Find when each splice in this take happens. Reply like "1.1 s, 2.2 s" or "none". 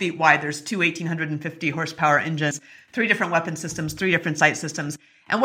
2.7 s

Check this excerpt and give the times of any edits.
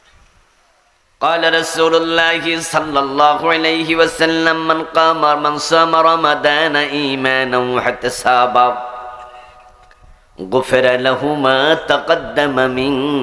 1.0 s

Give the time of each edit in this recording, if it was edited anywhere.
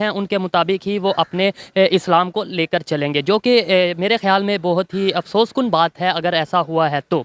none

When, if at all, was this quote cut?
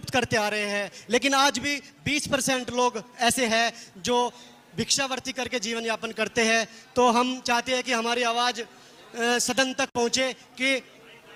none

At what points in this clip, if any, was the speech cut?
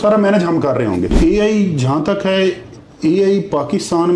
1.1 s

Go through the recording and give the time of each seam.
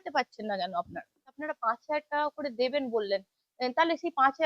1.4 s

